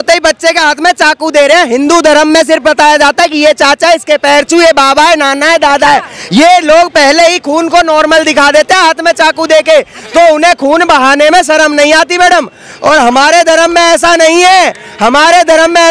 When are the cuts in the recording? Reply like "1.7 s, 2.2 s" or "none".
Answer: none